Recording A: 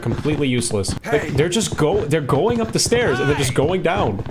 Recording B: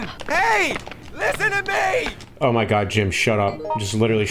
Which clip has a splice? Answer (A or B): A